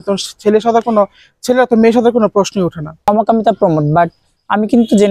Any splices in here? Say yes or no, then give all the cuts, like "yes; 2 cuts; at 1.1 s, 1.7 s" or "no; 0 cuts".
yes; 1 cut; at 3.1 s